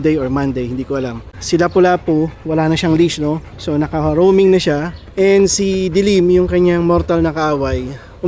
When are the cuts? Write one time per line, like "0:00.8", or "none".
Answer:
0:01.3
0:03.5
0:05.0